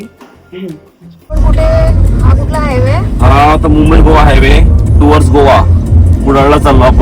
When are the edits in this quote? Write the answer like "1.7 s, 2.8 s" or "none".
1.4 s